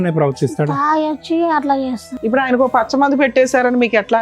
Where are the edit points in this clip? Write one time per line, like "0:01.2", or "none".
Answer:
0:02.1